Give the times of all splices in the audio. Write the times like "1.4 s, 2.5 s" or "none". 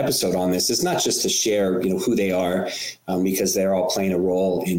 none

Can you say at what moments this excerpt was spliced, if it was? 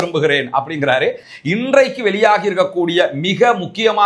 1.3 s

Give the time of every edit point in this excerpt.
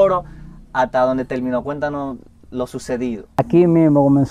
3.4 s

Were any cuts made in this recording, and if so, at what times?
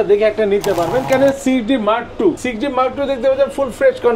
1.1 s, 2.5 s

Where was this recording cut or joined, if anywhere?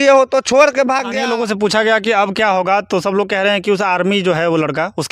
1.1 s

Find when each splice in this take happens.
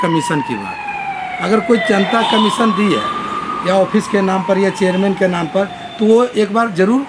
none

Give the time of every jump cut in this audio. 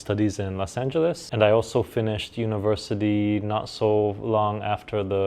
1.2 s

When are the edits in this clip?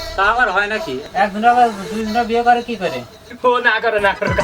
3.2 s

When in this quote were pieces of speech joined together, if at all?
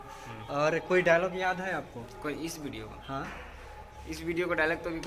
none

